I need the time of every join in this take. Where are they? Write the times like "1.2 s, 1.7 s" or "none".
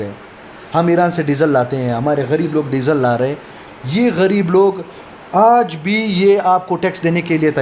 none